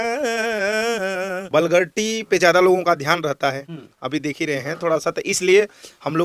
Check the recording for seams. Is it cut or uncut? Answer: cut